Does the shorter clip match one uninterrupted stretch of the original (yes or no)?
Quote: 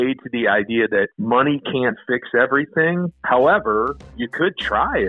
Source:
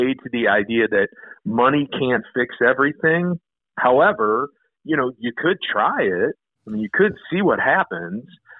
no